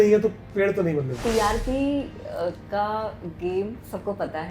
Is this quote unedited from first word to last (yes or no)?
no